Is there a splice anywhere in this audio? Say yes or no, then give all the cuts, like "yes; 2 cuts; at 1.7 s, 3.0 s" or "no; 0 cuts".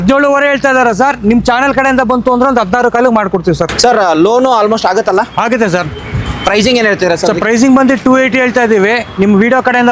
yes; 1 cut; at 3.7 s